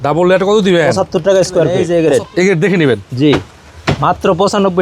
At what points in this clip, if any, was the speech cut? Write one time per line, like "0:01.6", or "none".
0:01.8